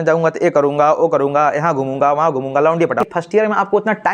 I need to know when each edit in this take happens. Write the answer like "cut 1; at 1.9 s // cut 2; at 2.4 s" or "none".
cut 1; at 3.1 s